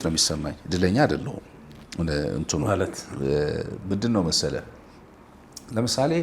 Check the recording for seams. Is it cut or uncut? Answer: uncut